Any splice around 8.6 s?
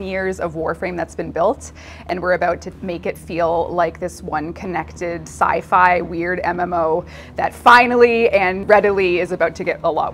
yes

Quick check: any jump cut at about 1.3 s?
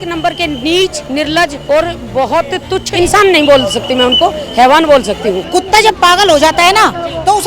yes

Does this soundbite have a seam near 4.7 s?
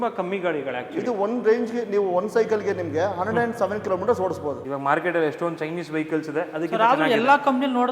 yes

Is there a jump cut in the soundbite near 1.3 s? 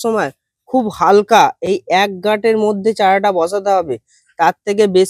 no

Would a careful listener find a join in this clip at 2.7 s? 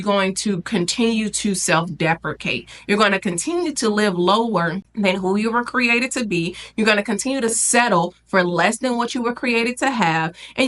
no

